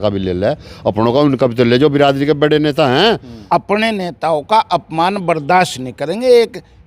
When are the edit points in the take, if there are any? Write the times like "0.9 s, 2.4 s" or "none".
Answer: 3.4 s